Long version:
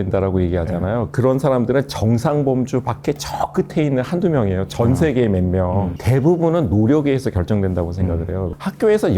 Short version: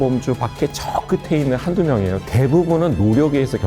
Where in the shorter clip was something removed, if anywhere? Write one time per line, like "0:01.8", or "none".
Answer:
0:02.2